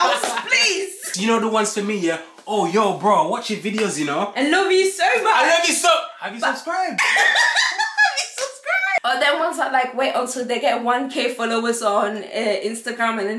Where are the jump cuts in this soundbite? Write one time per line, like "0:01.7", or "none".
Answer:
0:01.2
0:09.0